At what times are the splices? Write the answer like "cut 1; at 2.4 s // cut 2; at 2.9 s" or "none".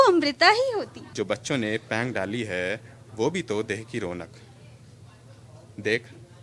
cut 1; at 1.0 s

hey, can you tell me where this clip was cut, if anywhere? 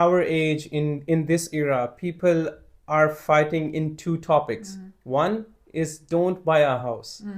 none

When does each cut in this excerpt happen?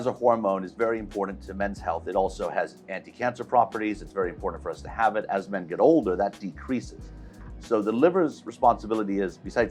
none

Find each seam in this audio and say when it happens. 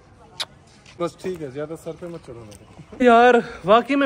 cut 1; at 1.0 s // cut 2; at 3.0 s

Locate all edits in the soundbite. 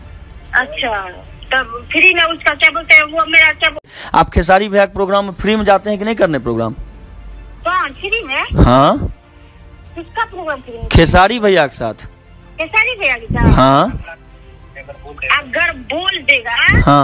cut 1; at 3.9 s

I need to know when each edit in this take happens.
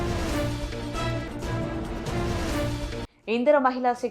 cut 1; at 3.0 s

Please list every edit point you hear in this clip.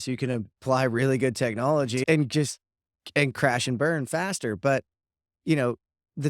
cut 1; at 2.0 s

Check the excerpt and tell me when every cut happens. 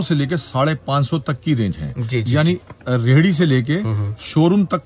none

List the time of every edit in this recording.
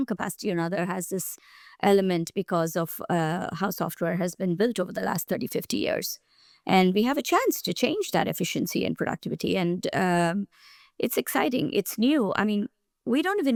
none

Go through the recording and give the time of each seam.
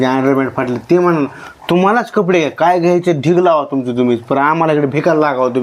none

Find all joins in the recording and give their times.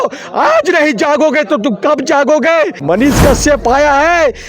cut 1; at 2.8 s

